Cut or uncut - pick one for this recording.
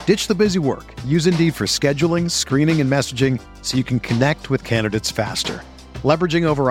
uncut